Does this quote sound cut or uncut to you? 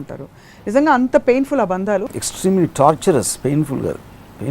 cut